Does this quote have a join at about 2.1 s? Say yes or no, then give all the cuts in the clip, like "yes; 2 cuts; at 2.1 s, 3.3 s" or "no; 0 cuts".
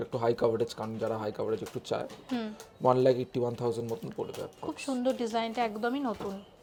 no; 0 cuts